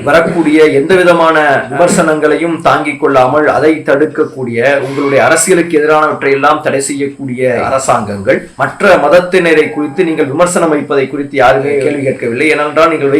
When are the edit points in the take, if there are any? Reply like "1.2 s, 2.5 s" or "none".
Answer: 11.9 s